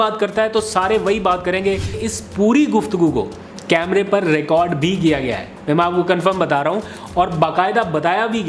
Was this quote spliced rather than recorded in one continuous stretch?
yes; 1 cut; at 2.0 s

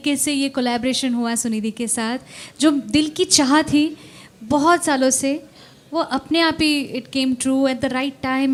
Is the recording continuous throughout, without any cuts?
yes; 0 cuts

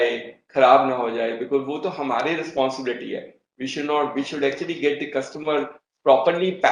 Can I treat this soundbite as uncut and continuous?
yes; 0 cuts

